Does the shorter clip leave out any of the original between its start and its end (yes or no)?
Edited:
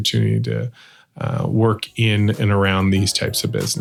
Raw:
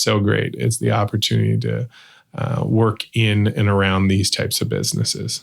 no